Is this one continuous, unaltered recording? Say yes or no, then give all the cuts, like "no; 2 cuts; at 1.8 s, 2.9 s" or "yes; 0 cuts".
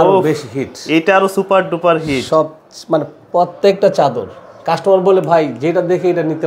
yes; 0 cuts